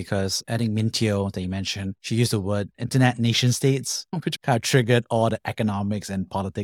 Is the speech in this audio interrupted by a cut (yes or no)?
no